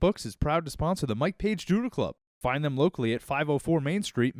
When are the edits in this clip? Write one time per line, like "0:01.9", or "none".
0:02.2